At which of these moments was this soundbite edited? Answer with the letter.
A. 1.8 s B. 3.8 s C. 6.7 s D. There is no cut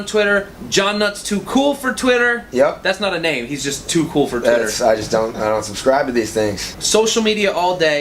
C